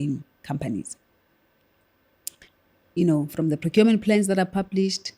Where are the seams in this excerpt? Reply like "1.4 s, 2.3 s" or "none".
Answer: none